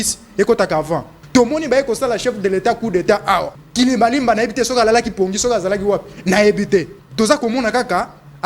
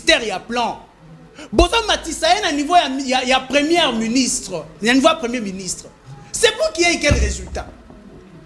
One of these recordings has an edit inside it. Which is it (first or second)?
first